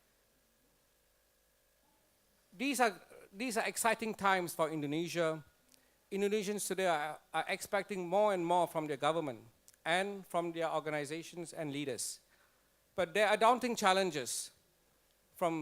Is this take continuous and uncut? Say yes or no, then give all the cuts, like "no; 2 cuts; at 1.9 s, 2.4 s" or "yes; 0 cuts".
no; 1 cut; at 6.8 s